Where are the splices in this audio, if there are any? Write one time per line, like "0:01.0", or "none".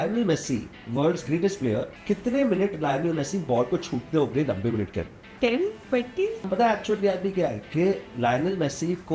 0:01.9
0:05.2
0:06.4